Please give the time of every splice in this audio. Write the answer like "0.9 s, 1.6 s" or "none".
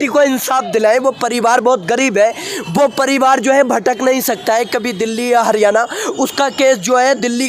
none